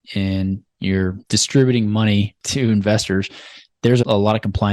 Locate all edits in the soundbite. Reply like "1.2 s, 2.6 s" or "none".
1.2 s, 2.4 s, 4.0 s